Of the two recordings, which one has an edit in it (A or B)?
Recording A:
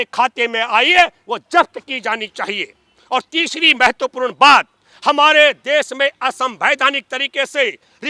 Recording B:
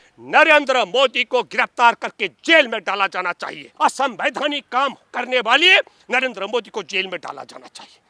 B